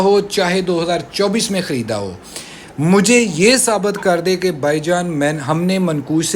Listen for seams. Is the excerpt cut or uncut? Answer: uncut